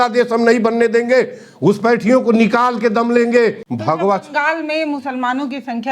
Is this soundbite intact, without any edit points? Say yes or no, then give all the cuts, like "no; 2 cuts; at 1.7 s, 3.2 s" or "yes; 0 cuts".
no; 1 cut; at 3.7 s